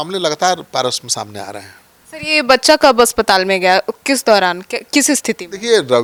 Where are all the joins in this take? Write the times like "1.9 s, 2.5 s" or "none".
none